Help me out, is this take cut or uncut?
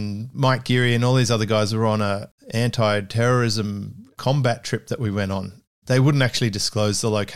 cut